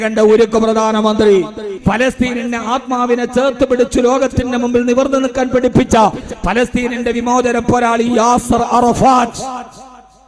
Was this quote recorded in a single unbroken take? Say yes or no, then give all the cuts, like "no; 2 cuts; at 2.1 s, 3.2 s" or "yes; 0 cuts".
no; 1 cut; at 1.7 s